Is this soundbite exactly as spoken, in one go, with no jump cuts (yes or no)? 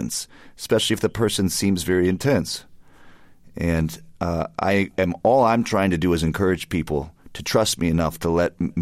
yes